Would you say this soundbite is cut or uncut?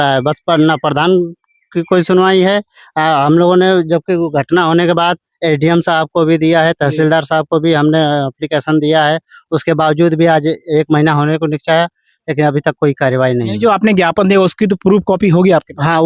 uncut